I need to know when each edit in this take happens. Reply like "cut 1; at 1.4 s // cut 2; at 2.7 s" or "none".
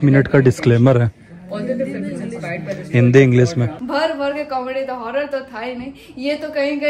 cut 1; at 3.8 s